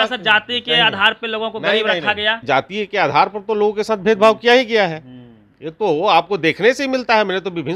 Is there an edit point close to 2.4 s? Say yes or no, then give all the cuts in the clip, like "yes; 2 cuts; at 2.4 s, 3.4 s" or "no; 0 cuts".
yes; 1 cut; at 2.4 s